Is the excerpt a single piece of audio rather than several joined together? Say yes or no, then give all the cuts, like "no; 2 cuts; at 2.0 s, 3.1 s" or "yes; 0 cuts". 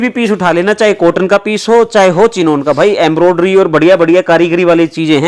yes; 0 cuts